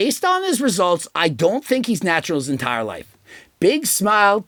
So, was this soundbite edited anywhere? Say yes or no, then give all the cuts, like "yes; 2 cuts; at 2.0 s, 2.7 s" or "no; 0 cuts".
no; 0 cuts